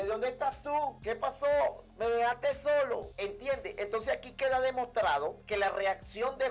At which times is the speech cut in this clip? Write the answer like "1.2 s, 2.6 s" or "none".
1.0 s, 3.1 s, 5.4 s